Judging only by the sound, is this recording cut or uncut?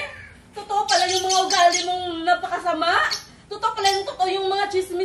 uncut